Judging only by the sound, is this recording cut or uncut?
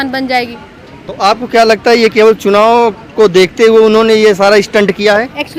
uncut